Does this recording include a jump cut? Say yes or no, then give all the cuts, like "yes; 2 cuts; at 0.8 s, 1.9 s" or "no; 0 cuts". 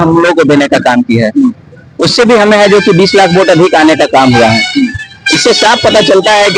no; 0 cuts